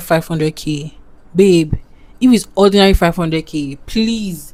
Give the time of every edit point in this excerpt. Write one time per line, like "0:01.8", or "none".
none